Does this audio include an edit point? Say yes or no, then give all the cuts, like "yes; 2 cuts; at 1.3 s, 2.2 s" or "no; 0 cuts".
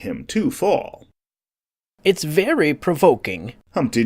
yes; 1 cut; at 2.8 s